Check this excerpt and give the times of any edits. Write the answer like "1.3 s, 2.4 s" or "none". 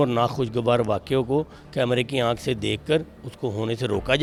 none